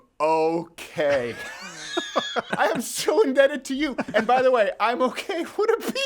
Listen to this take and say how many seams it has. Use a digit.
1